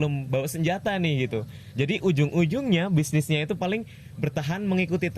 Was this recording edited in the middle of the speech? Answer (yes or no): no